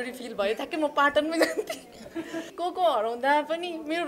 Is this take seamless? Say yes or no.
no